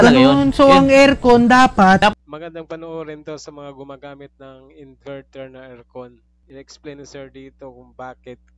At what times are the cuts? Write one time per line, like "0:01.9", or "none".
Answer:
0:02.1